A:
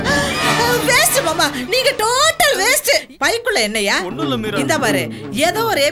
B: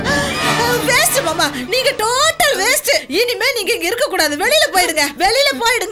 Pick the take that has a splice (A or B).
A